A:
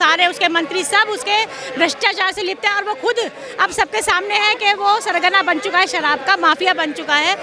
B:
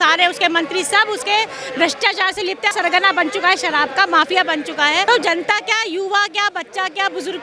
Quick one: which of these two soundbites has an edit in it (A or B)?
B